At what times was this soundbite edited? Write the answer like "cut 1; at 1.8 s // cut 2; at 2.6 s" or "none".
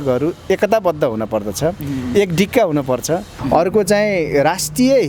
cut 1; at 3.3 s